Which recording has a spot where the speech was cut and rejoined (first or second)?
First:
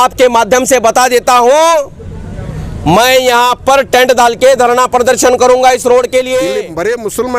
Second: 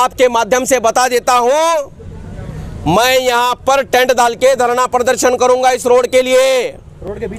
first